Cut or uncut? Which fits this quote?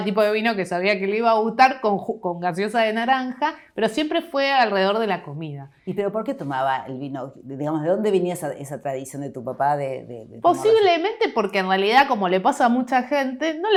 uncut